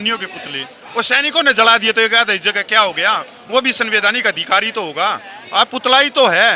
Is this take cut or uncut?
uncut